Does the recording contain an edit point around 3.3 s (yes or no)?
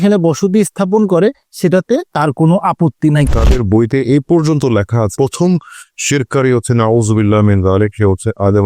yes